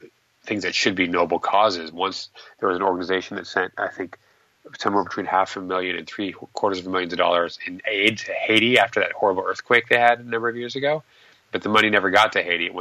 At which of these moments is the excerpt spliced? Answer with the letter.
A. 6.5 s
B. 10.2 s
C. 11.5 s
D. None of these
D